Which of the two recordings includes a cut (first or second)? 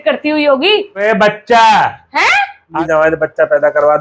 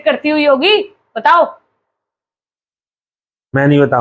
first